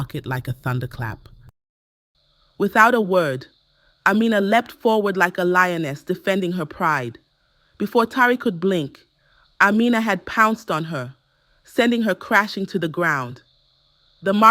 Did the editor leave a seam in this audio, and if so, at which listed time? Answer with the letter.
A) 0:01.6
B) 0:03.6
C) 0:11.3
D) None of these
A